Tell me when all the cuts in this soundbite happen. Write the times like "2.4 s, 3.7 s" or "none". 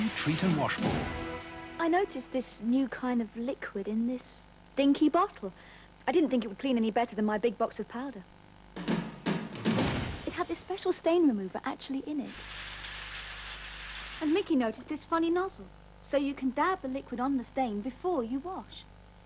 none

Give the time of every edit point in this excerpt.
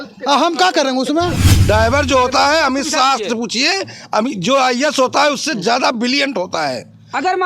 1.5 s

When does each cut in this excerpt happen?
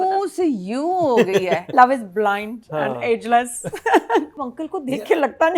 1.7 s, 4.4 s

